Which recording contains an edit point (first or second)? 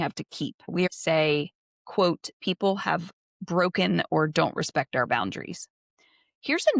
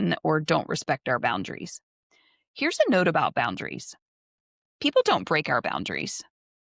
first